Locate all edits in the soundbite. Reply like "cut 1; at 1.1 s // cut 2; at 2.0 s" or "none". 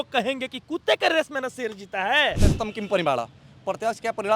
cut 1; at 2.5 s